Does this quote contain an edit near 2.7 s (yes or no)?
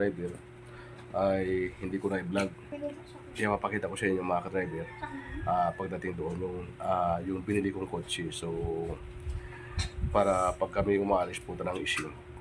yes